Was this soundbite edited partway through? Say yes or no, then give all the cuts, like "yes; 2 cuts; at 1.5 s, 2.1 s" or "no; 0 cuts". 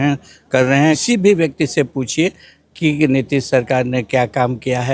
yes; 1 cut; at 1.0 s